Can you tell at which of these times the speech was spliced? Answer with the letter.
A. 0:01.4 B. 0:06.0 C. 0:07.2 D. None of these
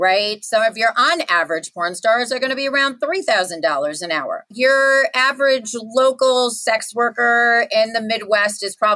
D